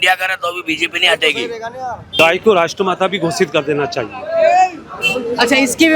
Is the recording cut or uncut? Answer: cut